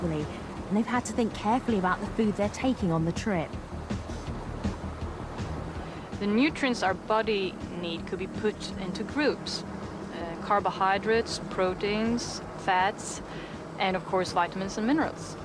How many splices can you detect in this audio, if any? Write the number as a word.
one